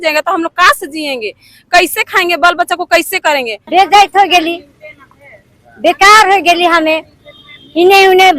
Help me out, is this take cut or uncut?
cut